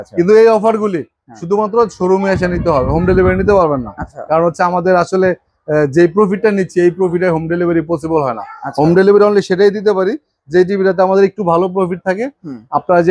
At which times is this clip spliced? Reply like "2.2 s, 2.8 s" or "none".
none